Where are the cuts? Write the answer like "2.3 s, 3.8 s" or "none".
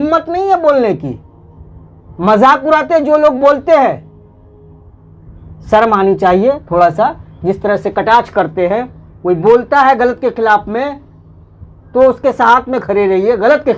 none